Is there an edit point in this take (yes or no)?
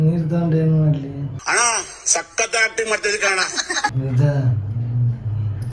yes